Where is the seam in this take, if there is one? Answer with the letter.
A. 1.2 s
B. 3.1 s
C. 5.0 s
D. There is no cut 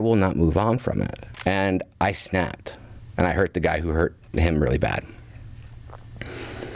A